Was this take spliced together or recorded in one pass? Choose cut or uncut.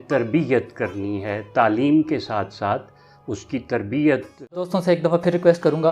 cut